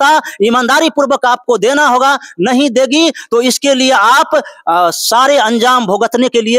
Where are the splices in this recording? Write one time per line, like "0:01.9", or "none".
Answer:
none